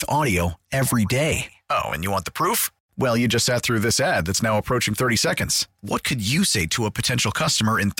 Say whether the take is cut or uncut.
uncut